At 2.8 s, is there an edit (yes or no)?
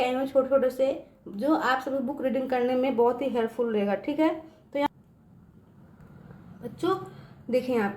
no